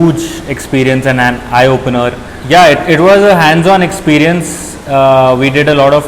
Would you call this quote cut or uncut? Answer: cut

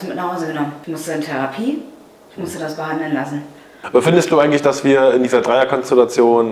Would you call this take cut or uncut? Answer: cut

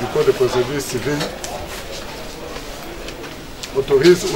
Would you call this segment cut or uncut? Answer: uncut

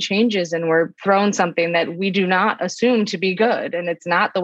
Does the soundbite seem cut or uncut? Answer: cut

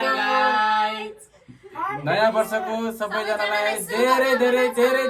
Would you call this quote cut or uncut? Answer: uncut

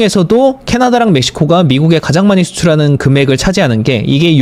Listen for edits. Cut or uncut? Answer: uncut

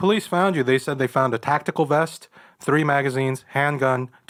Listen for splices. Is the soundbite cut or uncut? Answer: uncut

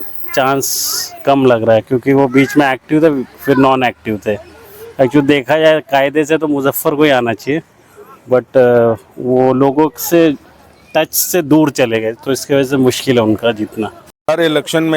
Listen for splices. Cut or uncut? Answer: cut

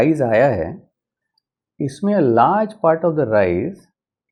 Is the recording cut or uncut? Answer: uncut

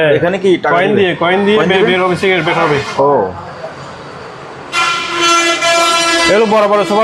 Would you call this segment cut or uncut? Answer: uncut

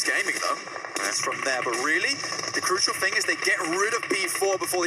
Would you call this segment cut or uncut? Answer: cut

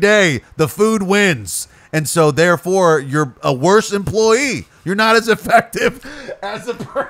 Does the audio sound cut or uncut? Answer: uncut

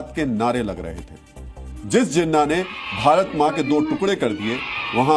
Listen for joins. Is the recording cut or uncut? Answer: uncut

